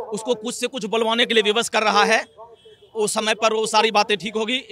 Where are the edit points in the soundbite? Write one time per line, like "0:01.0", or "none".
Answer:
none